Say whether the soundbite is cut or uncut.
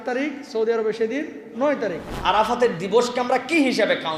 cut